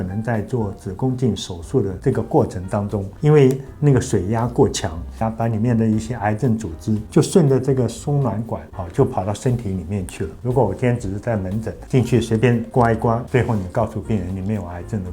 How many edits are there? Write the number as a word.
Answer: three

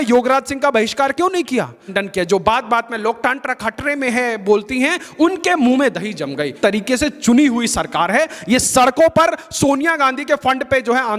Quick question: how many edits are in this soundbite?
two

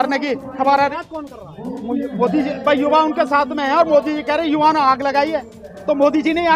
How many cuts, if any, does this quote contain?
one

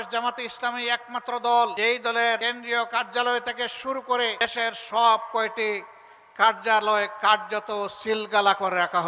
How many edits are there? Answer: two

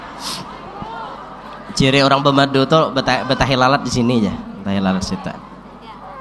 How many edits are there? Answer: zero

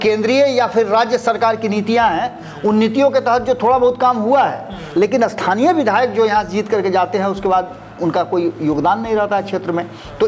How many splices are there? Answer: zero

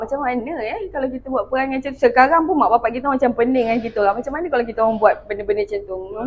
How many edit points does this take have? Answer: zero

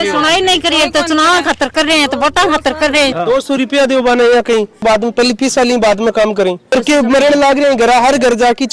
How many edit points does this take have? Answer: three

